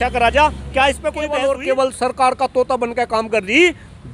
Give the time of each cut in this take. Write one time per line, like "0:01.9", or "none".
0:01.1